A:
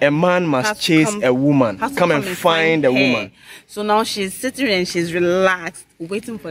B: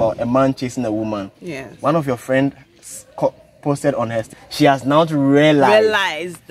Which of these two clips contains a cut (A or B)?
B